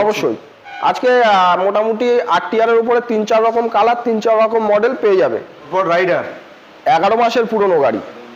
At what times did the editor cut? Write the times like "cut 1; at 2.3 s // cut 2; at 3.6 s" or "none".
cut 1; at 5.6 s